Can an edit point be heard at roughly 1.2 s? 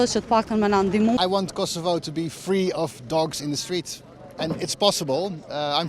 yes; 1 cut; at 1.2 s

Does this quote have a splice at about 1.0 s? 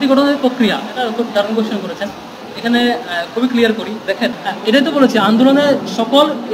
no; 1 cut; at 4.4 s

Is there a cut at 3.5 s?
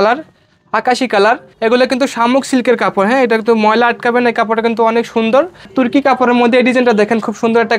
no; 2 cuts; at 1.5 s, 5.7 s

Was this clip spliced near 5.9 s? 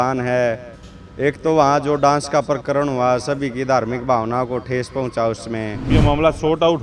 yes; 1 cut; at 5.9 s

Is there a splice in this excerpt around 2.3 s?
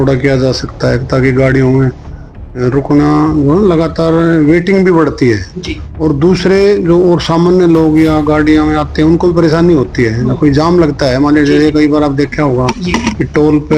no; 0 cuts

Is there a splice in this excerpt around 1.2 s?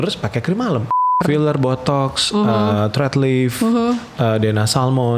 yes; 1 cut; at 1.2 s

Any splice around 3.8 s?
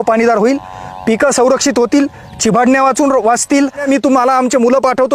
yes; 1 cut; at 3.8 s

